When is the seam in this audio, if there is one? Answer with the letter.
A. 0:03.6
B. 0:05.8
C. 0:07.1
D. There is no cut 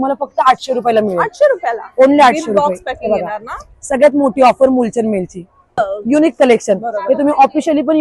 B